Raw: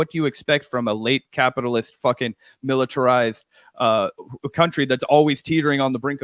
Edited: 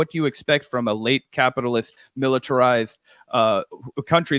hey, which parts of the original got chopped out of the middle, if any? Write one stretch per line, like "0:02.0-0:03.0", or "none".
0:01.9-0:02.4